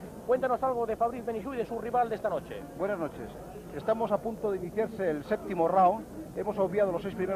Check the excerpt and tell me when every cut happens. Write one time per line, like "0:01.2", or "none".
0:06.2